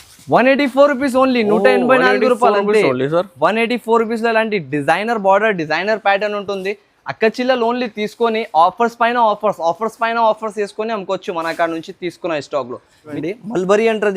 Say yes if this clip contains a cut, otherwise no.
yes